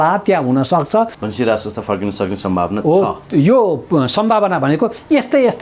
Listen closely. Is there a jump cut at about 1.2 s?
yes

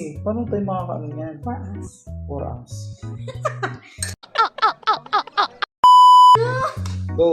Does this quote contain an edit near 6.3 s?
yes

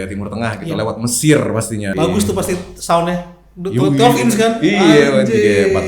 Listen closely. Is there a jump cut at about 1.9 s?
yes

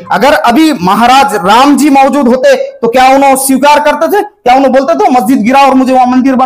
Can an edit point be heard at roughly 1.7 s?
no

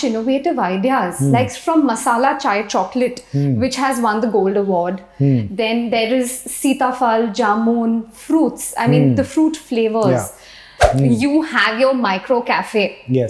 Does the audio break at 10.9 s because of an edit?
yes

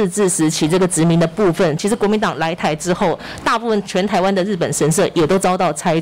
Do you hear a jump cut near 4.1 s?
no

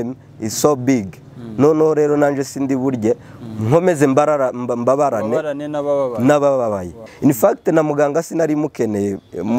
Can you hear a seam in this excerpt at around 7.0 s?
yes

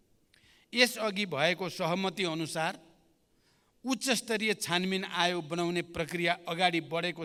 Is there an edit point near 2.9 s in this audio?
no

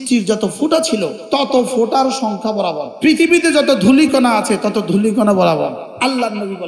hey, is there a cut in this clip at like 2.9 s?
yes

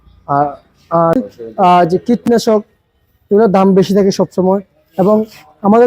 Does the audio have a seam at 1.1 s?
yes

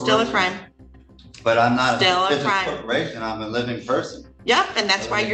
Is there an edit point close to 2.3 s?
no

